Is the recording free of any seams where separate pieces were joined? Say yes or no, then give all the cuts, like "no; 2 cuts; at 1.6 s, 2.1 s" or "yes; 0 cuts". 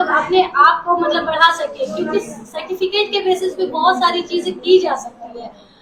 yes; 0 cuts